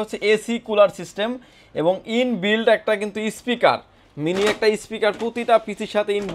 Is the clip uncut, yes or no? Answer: yes